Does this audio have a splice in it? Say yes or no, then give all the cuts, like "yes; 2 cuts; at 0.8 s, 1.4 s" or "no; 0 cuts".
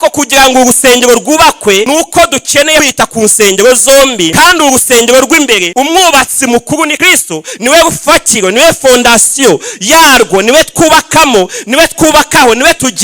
yes; 5 cuts; at 1.9 s, 2.9 s, 4.3 s, 5.7 s, 7.0 s